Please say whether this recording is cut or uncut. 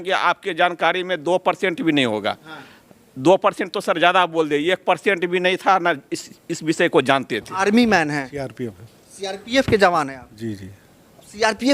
cut